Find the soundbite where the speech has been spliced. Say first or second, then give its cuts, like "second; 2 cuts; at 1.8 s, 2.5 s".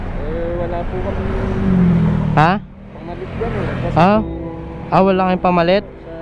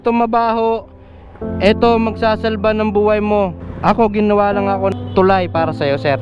second; 2 cuts; at 3.6 s, 4.9 s